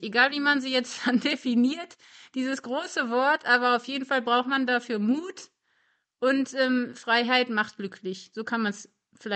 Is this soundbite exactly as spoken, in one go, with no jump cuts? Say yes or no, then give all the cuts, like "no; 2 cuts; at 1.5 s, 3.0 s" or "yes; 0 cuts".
yes; 0 cuts